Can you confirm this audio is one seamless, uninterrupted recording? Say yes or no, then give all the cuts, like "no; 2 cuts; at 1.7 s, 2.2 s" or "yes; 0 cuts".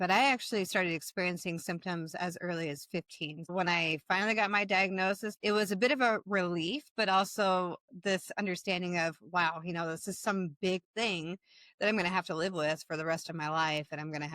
no; 2 cuts; at 3.5 s, 5.3 s